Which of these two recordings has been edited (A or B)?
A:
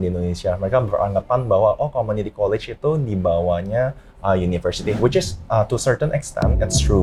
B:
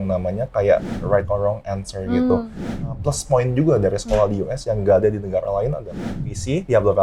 B